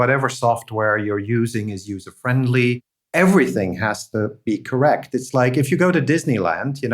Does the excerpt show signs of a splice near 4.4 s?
no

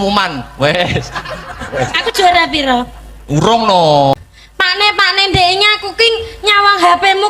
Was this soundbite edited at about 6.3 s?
no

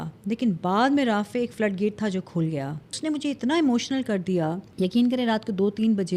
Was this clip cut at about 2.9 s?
yes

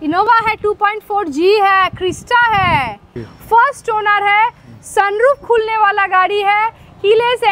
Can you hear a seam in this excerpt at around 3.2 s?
yes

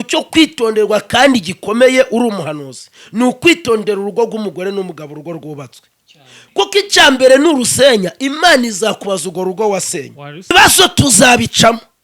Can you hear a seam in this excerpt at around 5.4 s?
no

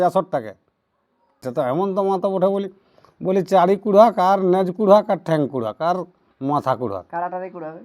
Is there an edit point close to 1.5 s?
yes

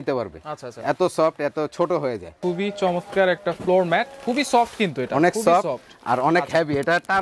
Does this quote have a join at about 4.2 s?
no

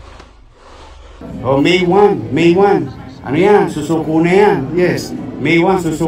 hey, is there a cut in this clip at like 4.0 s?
no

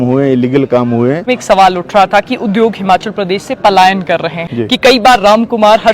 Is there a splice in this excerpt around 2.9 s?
no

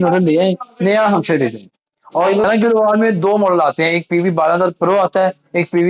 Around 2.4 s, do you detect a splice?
yes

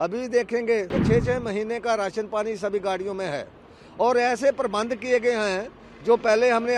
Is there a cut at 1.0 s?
yes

